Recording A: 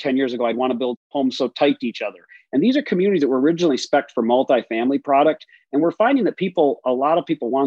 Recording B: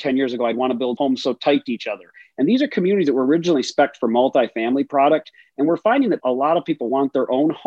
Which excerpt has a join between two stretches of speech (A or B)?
B